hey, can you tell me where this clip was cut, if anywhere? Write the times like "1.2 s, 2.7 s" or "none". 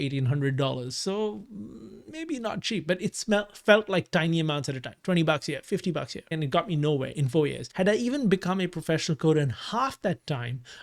6.3 s, 7.6 s